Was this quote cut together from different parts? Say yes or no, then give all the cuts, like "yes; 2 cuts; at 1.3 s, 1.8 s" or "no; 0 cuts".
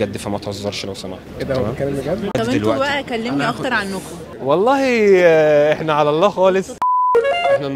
no; 0 cuts